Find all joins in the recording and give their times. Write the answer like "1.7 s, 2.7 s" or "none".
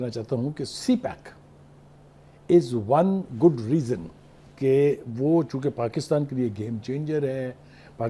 none